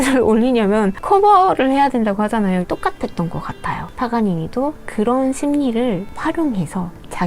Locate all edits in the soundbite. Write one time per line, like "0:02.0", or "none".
0:02.6